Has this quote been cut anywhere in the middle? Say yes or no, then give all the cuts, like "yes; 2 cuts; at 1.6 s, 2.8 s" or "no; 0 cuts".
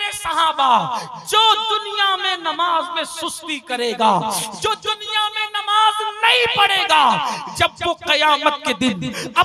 no; 0 cuts